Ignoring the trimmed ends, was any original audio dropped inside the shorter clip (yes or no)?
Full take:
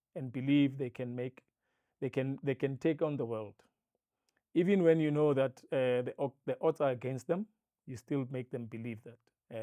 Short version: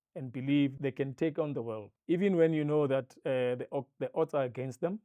yes